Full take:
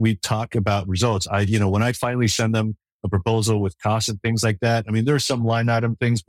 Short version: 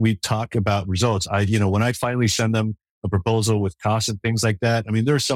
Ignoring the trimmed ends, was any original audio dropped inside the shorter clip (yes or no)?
no